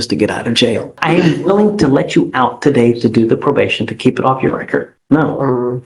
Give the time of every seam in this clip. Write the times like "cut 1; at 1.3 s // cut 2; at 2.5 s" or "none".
cut 1; at 0.9 s // cut 2; at 4.9 s